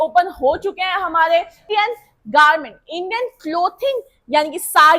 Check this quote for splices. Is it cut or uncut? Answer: cut